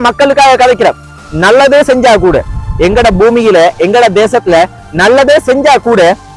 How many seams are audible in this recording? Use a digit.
1